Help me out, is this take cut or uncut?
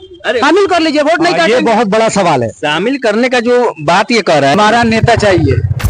cut